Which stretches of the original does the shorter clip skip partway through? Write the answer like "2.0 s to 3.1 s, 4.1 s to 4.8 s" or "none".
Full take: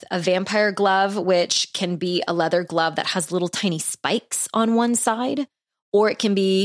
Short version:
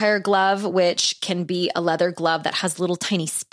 none